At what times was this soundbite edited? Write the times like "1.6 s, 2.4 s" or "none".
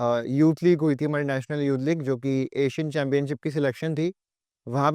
none